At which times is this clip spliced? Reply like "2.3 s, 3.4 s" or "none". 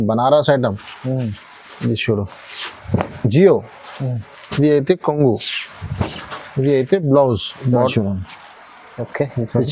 7.9 s